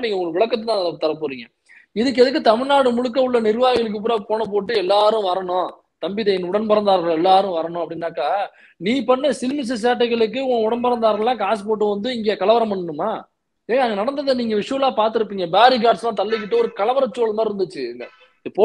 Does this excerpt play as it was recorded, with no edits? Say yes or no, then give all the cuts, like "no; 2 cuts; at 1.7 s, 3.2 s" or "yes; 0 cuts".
yes; 0 cuts